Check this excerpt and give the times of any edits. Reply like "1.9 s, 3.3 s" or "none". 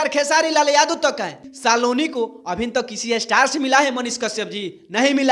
1.3 s